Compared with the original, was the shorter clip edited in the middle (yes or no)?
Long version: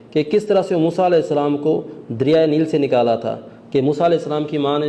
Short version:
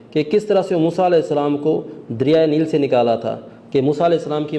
no